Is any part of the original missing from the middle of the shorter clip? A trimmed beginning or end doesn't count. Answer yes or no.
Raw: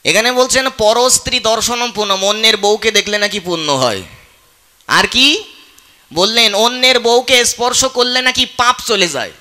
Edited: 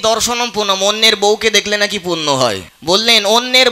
yes